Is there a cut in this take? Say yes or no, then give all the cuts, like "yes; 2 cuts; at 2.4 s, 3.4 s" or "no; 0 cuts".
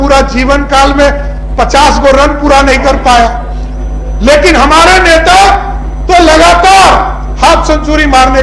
no; 0 cuts